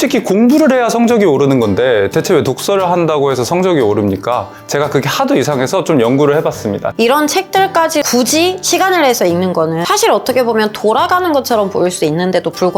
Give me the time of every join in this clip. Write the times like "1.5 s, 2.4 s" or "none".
6.9 s, 8.1 s, 9.8 s

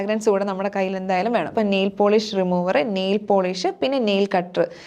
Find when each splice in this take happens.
1.5 s

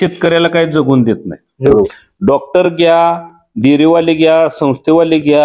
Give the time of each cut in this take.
1.7 s

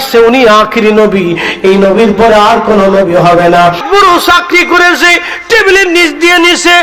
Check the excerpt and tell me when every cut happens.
3.8 s

